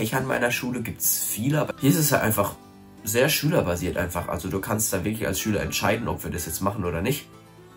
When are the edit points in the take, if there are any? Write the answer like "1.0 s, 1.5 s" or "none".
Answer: 1.7 s